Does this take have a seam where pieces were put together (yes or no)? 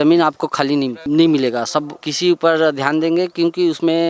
yes